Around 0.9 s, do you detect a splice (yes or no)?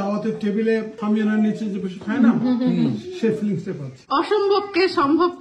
yes